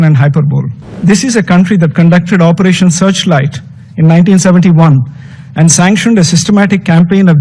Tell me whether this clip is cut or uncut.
cut